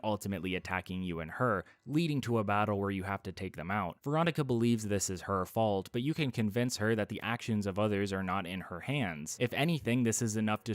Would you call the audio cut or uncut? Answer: cut